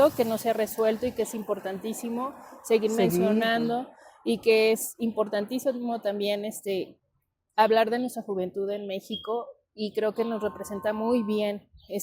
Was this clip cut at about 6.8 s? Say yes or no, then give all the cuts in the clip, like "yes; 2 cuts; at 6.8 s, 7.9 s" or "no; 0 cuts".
no; 0 cuts